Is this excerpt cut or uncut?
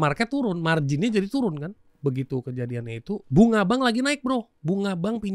cut